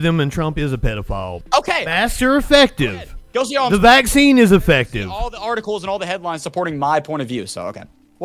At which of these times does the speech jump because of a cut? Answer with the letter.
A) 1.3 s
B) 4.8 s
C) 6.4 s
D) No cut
A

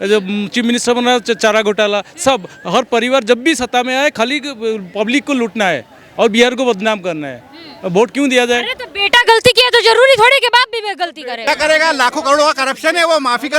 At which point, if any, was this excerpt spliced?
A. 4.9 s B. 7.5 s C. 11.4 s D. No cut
C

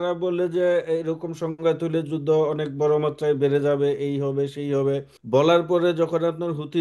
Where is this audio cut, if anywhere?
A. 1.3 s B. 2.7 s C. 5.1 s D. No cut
C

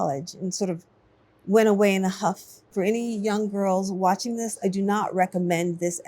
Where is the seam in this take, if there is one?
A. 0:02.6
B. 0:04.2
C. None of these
A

